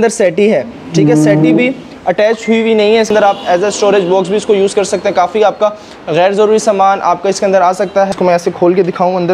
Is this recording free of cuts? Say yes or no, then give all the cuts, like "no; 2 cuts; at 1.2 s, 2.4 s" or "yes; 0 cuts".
no; 2 cuts; at 3.1 s, 8.1 s